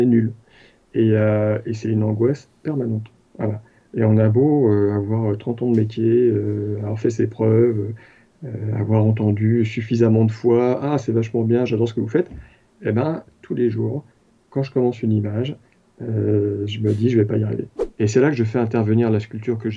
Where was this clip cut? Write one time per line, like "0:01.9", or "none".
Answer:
0:17.8